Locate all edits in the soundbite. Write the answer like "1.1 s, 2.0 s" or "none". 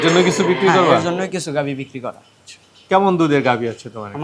2.3 s

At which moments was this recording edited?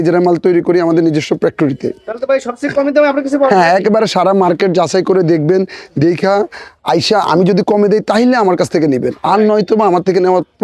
none

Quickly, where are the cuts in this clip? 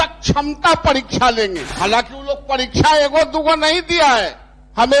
1.6 s

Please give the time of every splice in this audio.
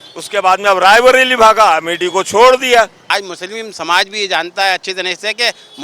3.0 s

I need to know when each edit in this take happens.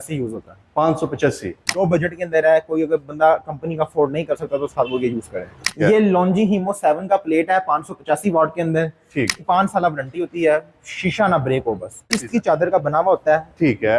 1.7 s, 5.7 s, 9.4 s, 12.1 s

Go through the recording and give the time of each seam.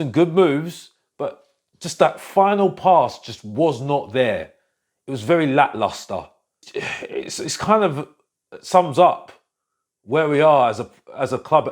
6.6 s

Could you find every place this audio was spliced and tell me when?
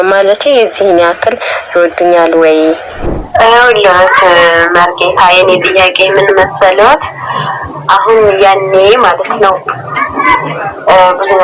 2.9 s

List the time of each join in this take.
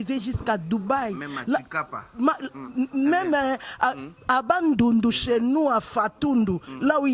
none

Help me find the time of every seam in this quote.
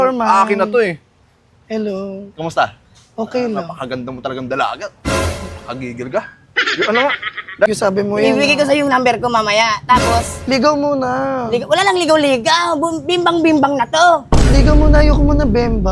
7.7 s

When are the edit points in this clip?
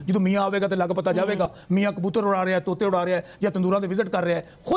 none

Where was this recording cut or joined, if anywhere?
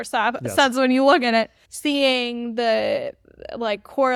none

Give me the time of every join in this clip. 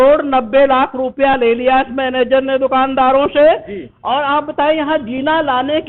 none

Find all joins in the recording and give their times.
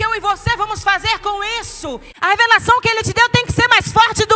2.1 s

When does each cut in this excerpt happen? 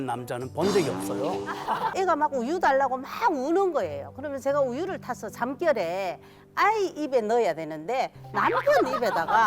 1.9 s

